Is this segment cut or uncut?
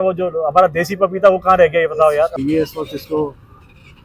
cut